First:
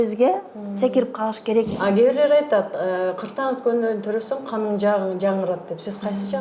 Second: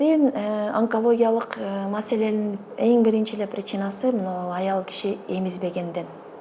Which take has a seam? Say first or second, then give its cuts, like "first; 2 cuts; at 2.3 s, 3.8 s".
first; 1 cut; at 1.7 s